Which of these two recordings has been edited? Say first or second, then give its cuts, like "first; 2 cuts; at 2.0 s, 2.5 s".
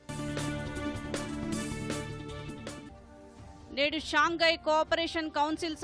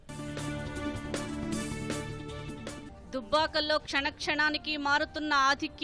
second; 1 cut; at 2.9 s